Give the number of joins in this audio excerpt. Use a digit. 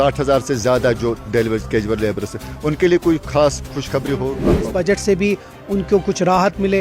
1